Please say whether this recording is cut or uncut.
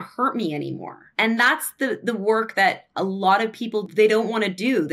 cut